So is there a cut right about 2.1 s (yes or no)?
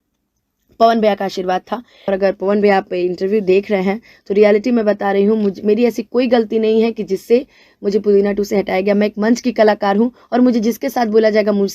yes